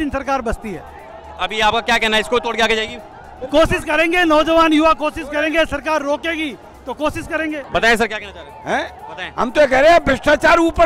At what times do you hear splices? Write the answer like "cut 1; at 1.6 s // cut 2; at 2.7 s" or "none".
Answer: none